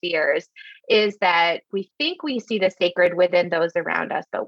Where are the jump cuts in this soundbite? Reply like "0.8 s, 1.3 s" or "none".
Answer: 1.6 s